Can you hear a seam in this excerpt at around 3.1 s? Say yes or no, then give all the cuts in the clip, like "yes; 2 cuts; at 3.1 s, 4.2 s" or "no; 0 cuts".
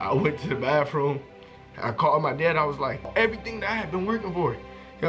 yes; 1 cut; at 3.1 s